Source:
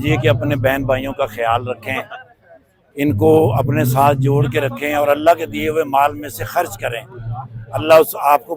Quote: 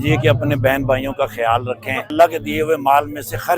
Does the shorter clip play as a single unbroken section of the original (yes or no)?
no